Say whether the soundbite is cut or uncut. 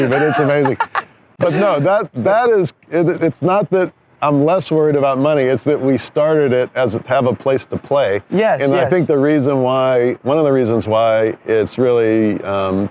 uncut